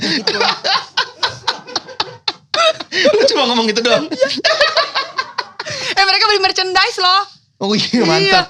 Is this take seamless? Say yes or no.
yes